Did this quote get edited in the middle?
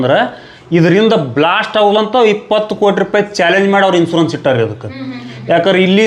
no; 0 cuts

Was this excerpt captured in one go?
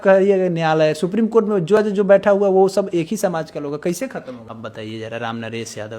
no; 1 cut; at 4.4 s

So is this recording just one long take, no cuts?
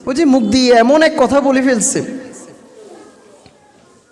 yes; 0 cuts

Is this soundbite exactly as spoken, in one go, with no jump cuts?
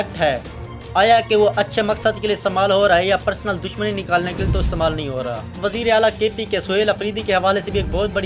no; 1 cut; at 5.6 s

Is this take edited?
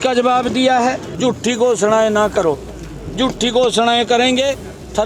yes; 1 cut; at 1.1 s

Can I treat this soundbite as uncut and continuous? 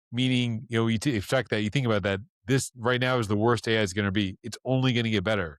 yes; 0 cuts

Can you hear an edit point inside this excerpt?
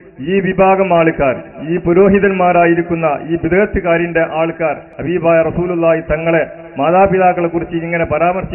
yes; 1 cut; at 4.9 s

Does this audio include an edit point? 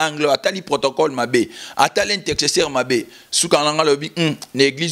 no; 0 cuts

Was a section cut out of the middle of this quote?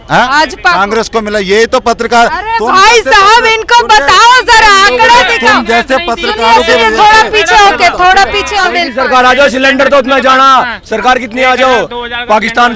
yes; 1 cut; at 8.6 s

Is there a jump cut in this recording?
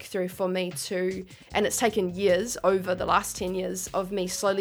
no; 0 cuts

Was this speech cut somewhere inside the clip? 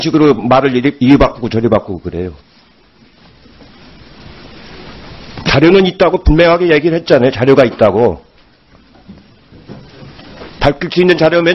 no; 0 cuts

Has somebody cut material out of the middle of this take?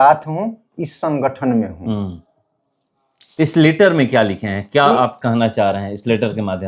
no; 0 cuts

